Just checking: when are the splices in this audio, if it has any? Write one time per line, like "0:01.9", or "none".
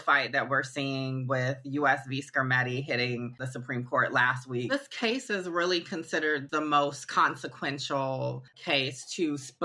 0:04.7
0:06.5
0:08.5